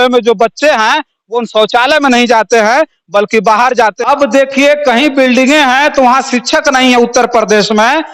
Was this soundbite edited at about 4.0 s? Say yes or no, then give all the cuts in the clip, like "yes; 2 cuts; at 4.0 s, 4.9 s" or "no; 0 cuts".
yes; 1 cut; at 4.0 s